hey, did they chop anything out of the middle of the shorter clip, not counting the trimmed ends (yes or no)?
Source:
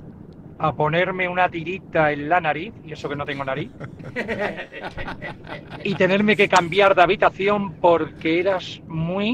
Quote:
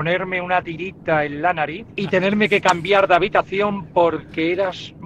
yes